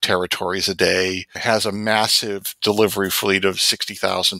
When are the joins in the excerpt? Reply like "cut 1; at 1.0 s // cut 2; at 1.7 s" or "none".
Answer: cut 1; at 1.3 s